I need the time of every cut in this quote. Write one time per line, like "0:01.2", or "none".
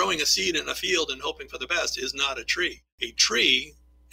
0:02.6